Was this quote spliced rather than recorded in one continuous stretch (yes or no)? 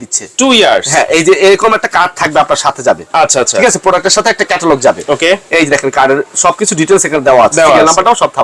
no